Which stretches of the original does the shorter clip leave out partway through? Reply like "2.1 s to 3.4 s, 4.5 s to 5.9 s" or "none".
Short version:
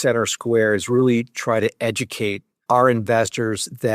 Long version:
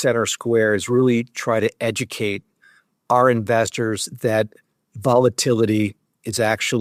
2.5 s to 2.9 s